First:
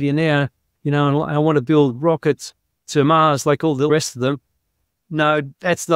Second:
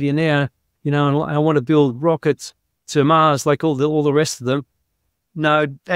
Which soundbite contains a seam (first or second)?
first